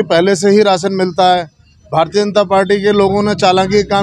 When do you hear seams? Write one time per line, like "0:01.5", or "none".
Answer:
none